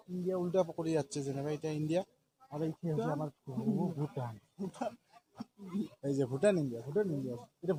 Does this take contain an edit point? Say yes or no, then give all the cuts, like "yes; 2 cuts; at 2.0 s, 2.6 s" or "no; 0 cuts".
no; 0 cuts